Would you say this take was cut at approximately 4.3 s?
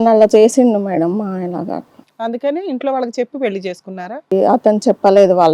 yes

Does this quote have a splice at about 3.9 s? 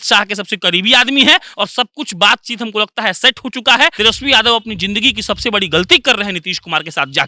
yes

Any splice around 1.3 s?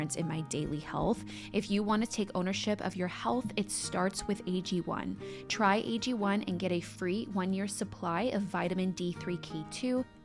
yes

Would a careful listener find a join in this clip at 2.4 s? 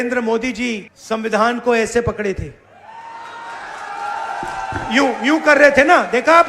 no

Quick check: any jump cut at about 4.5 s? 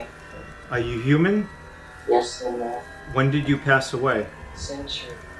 yes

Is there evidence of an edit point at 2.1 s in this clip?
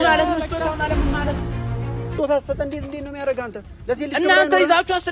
yes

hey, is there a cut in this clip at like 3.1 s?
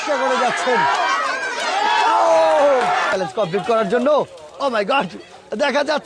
yes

